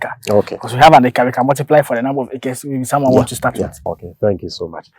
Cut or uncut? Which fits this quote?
cut